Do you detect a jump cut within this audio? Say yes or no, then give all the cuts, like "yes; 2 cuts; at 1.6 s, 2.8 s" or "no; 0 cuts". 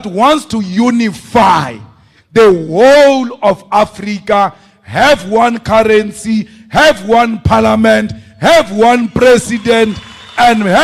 no; 0 cuts